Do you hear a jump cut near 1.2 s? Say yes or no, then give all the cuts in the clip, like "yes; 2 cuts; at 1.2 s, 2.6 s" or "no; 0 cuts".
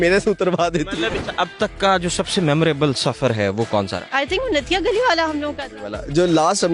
yes; 2 cuts; at 1.2 s, 4.0 s